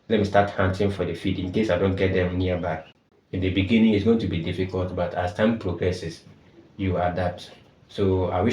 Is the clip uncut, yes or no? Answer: no